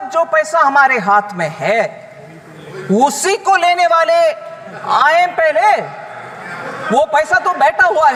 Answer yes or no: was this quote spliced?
no